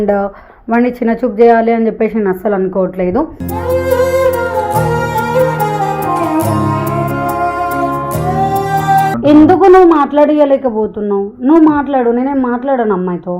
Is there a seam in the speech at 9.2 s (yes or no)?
yes